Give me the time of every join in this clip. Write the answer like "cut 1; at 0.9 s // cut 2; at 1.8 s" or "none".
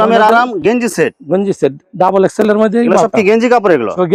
none